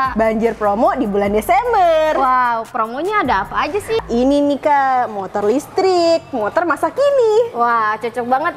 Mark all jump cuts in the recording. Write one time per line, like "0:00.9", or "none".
0:04.0

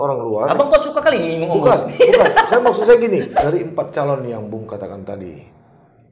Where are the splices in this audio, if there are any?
0:03.3

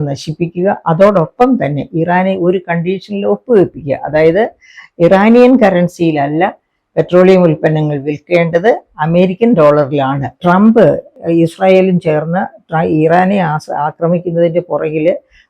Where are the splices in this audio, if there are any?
0:10.4
0:11.1

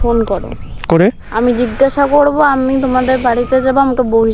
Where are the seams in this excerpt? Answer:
none

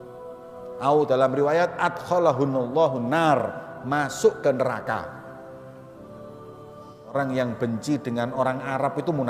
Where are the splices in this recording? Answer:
0:00.8
0:05.0
0:06.9

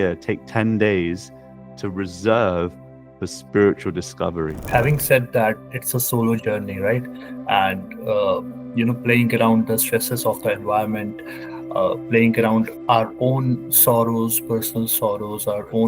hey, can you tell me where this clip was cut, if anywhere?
0:04.6
0:12.8

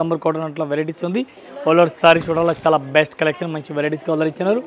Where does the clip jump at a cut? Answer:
0:01.4

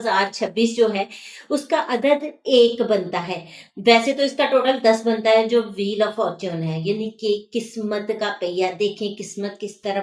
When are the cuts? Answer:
none

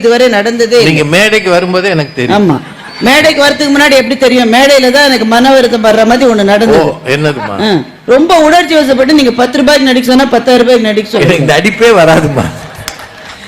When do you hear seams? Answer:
none

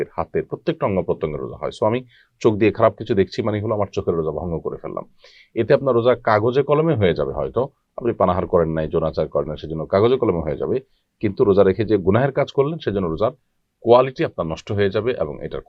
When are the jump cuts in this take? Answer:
none

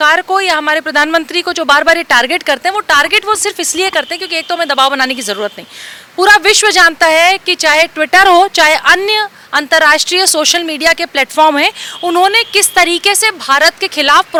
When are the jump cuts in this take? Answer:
none

